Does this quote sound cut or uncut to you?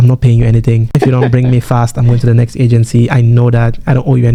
uncut